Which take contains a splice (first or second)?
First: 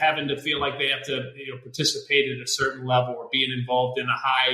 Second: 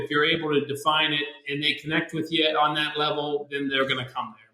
second